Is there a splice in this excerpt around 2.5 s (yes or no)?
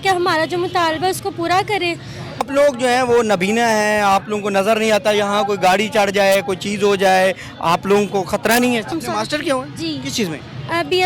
yes